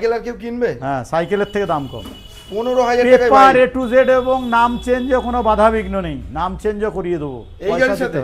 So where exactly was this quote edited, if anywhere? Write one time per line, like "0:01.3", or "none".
none